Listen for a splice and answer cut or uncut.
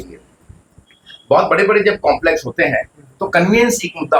uncut